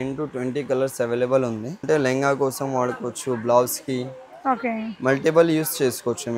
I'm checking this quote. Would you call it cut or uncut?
cut